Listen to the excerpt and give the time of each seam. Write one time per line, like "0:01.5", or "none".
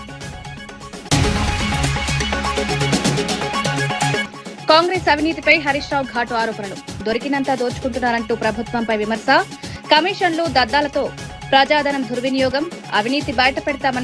none